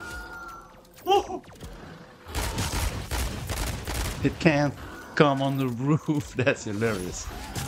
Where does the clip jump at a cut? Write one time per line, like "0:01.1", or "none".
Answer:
none